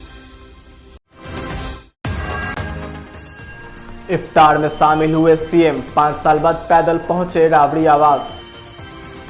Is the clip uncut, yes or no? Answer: no